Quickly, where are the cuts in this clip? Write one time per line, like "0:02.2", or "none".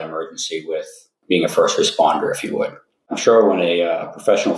0:01.1
0:03.1